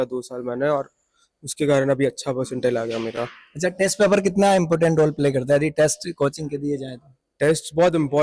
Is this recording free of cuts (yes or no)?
yes